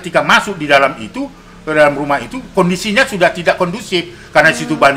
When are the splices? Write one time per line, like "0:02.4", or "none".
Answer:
none